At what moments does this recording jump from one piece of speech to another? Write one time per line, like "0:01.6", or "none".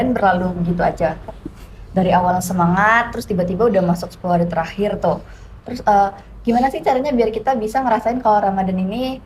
none